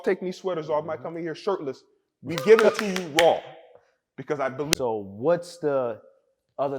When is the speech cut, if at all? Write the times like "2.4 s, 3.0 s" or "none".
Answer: 4.7 s